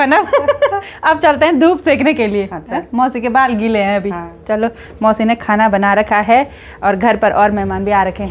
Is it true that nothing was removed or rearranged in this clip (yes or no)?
yes